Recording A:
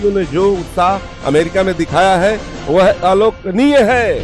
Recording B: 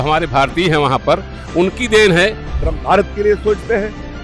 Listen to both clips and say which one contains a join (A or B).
B